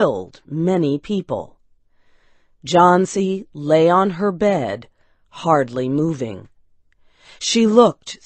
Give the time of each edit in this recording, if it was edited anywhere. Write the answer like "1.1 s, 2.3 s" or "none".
none